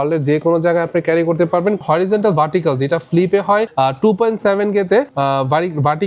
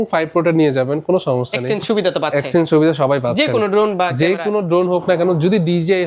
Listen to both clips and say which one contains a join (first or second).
first